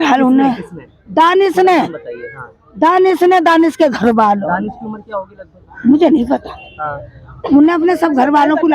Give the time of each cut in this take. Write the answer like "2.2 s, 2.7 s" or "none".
none